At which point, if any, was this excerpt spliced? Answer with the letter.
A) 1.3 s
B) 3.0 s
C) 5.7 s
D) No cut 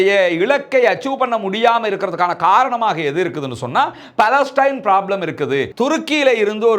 C